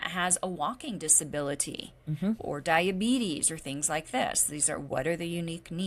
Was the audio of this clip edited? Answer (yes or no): no